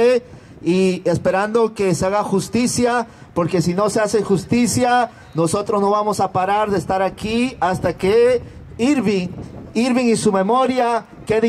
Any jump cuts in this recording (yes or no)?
no